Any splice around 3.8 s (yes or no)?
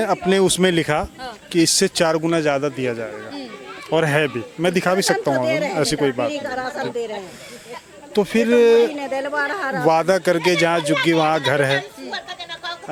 no